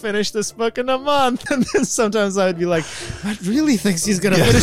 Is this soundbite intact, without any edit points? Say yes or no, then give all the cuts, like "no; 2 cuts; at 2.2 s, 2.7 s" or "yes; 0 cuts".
no; 1 cut; at 1.5 s